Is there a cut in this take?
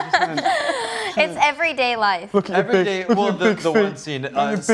no; 0 cuts

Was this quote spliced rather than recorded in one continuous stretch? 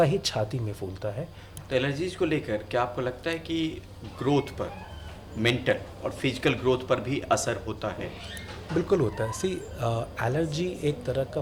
yes; 1 cut; at 1.5 s

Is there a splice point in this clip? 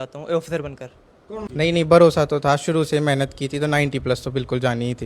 yes; 1 cut; at 1.6 s

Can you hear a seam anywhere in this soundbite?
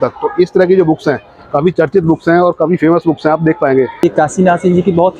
yes; 1 cut; at 4.0 s

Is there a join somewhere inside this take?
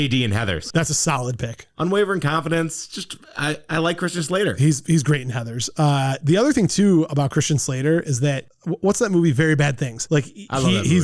no; 0 cuts

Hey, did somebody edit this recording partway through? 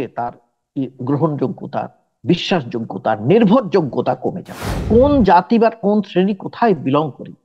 yes; 1 cut; at 4.8 s

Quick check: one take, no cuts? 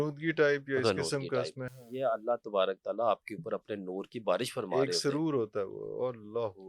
yes; 0 cuts

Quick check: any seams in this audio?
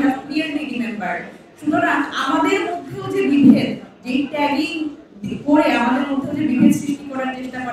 no; 0 cuts

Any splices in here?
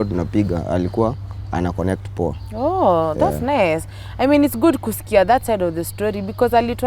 no; 0 cuts

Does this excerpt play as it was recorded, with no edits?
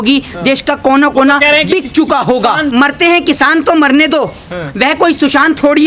no; 1 cut; at 2.7 s

